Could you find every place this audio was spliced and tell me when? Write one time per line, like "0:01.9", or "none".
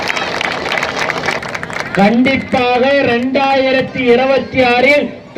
0:01.4

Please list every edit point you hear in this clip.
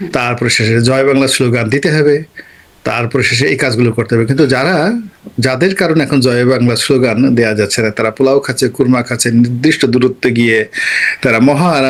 none

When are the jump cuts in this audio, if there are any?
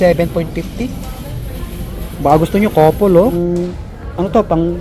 0:03.4

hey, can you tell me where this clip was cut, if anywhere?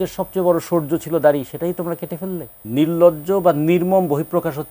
0:02.6

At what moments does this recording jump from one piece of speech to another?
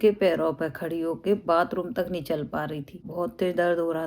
0:03.0

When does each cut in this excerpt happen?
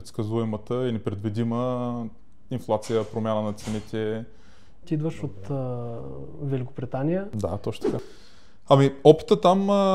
0:04.8
0:08.1

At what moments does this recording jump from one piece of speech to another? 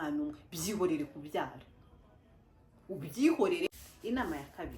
0:03.7

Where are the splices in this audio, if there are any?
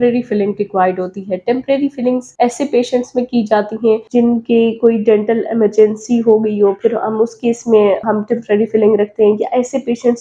none

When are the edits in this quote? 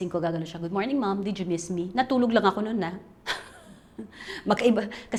none

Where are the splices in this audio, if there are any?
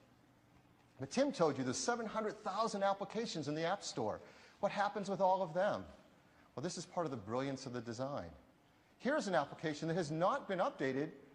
0:01.1

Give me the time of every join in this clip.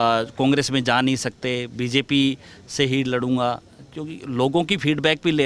none

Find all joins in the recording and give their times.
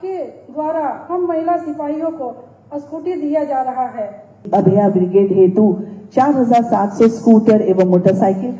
0:04.4

